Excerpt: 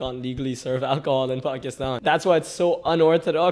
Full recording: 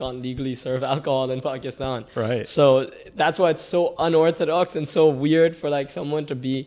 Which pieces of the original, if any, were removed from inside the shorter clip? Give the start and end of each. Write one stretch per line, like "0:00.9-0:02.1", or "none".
0:01.9-0:03.0